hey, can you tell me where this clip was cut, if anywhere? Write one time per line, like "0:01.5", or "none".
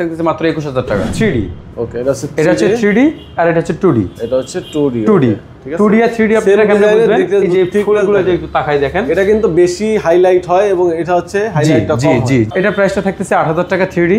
0:01.1
0:12.5